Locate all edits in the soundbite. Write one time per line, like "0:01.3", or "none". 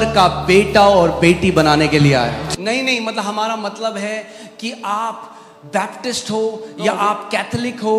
0:02.4